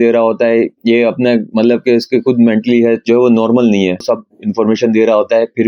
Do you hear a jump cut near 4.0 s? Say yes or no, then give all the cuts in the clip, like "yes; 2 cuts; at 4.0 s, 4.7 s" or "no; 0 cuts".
yes; 1 cut; at 4.0 s